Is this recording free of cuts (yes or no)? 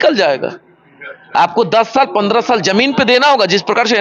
yes